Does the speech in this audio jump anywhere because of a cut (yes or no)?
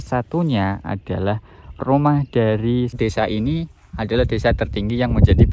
yes